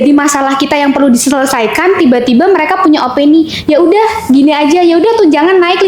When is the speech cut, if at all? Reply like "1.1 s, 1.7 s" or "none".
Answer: none